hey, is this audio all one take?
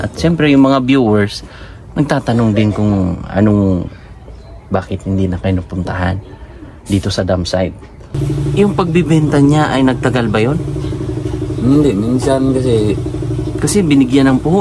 no; 1 cut; at 8.1 s

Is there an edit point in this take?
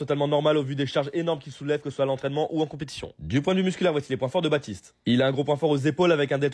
yes; 1 cut; at 4.1 s

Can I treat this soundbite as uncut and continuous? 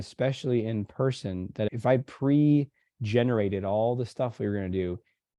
no; 1 cut; at 1.7 s

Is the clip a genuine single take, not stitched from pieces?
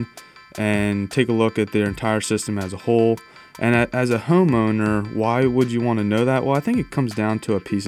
yes; 0 cuts

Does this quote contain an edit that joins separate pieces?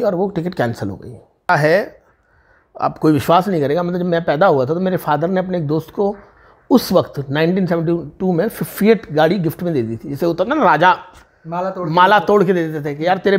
yes; 1 cut; at 1.5 s

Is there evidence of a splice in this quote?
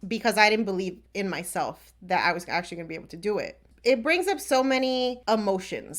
yes; 2 cuts; at 3.7 s, 5.2 s

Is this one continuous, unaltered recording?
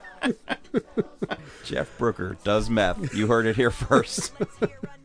no; 1 cut; at 1.4 s

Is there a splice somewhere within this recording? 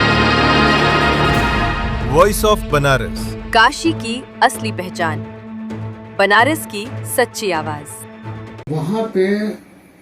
yes; 1 cut; at 8.7 s

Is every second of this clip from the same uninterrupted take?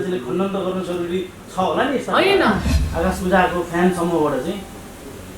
no; 1 cut; at 2.8 s

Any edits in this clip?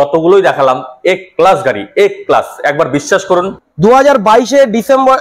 yes; 1 cut; at 3.6 s

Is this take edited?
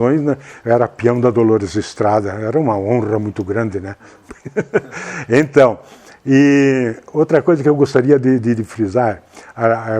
no; 0 cuts

